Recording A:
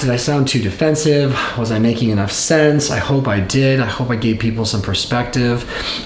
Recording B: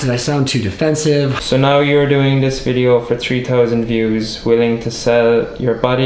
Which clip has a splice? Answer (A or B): B